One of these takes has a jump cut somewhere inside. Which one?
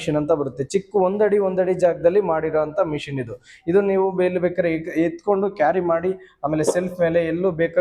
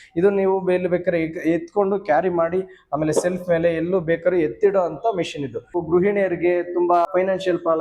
second; 2 cuts; at 5.8 s, 7.1 s

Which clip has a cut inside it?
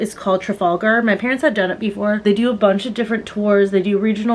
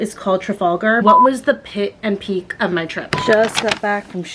second; 2 cuts; at 1.0 s, 3.0 s

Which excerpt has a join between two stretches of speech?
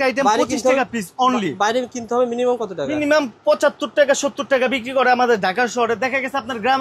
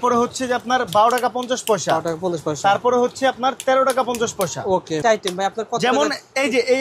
second; 1 cut; at 5.0 s

